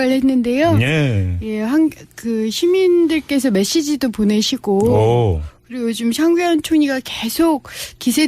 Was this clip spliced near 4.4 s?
no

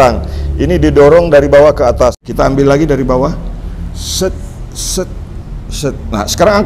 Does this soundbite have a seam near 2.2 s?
yes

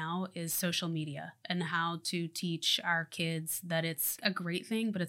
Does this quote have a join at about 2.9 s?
no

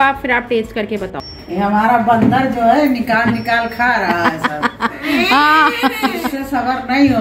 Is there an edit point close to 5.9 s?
no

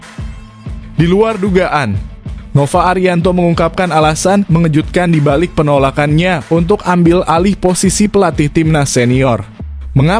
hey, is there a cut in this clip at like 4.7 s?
no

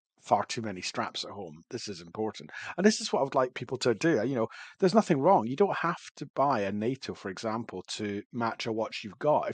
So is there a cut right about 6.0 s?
no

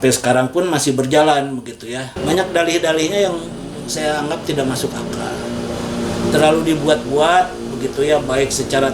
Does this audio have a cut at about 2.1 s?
yes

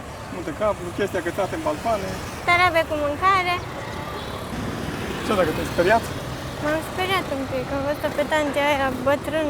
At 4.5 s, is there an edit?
yes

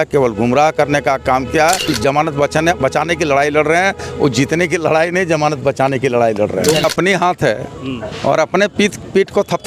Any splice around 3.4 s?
no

